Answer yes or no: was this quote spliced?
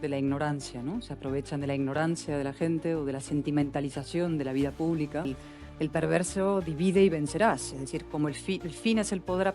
yes